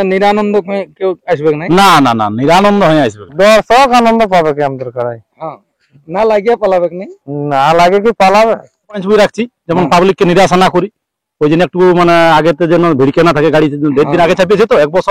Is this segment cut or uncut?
cut